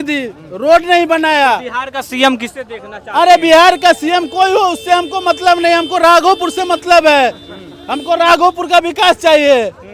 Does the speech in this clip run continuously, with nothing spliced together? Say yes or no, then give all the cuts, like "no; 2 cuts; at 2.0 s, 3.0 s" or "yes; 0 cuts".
yes; 0 cuts